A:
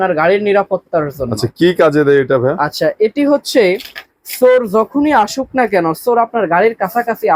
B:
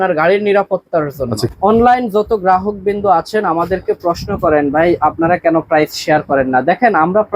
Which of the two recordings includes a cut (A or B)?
B